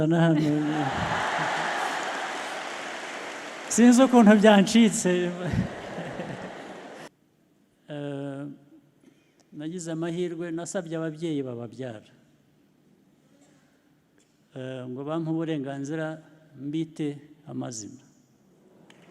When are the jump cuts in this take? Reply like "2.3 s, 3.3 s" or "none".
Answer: 7.1 s